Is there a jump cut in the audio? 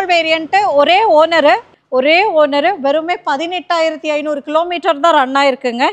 yes; 1 cut; at 1.7 s

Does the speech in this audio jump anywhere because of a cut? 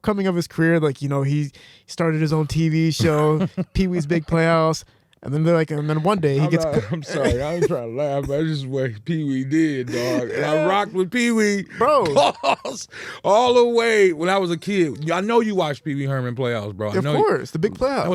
no; 0 cuts

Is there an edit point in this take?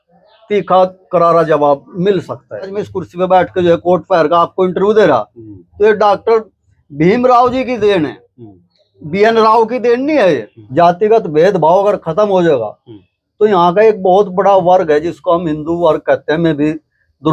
yes; 2 cuts; at 2.7 s, 10.6 s

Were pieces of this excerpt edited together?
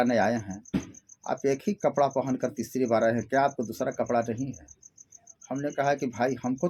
no; 0 cuts

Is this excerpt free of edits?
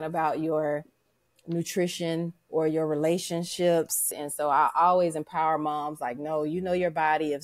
no; 1 cut; at 4.1 s

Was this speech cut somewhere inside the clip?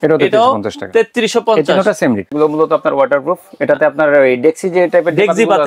yes; 1 cut; at 2.3 s

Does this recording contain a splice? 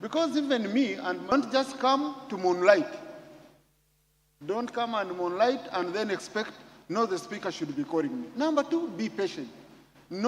yes; 1 cut; at 1.3 s

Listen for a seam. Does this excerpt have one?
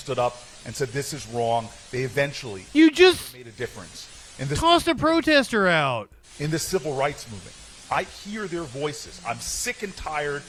no; 0 cuts

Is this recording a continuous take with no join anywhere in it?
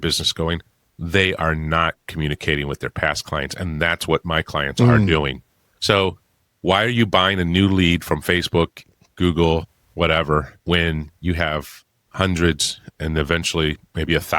no; 1 cut; at 10.5 s

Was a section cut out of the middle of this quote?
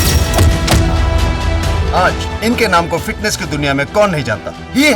no; 0 cuts

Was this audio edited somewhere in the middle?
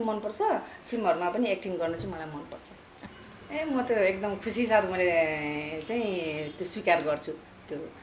yes; 1 cut; at 3.0 s

